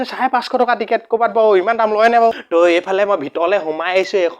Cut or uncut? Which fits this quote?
cut